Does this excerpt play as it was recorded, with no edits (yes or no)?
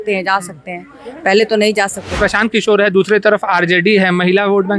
no